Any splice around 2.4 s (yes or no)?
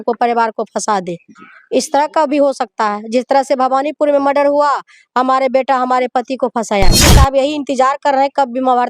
no